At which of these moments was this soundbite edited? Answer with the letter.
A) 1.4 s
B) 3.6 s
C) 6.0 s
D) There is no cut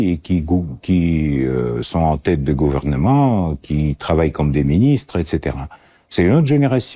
D